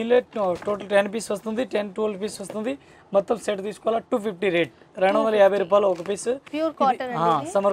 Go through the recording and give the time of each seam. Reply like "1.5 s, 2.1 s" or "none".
none